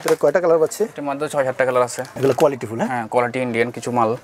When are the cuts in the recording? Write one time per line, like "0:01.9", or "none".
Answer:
0:02.1